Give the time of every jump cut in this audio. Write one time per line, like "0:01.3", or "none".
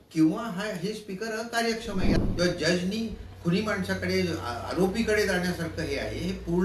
0:02.2